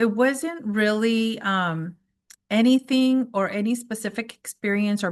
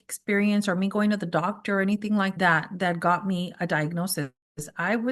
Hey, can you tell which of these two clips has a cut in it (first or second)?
second